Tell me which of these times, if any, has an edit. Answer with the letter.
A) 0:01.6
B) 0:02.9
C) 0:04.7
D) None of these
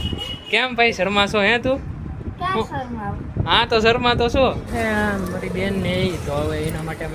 C